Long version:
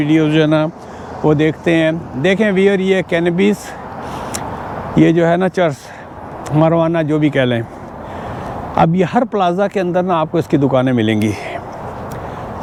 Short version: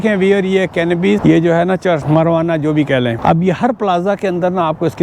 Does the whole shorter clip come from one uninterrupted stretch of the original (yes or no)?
no